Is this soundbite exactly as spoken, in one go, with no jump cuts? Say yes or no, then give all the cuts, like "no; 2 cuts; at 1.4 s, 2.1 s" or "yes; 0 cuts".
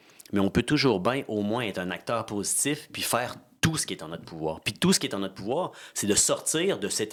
yes; 0 cuts